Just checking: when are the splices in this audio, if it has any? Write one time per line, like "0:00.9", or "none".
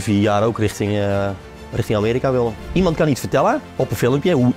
0:02.6
0:03.7